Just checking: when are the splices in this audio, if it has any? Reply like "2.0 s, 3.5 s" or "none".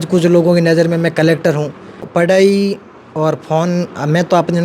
2.1 s